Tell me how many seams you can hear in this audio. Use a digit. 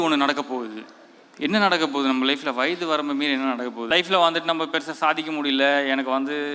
1